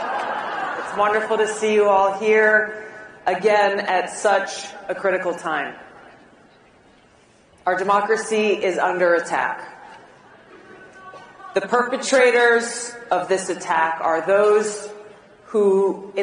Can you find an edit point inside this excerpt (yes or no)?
yes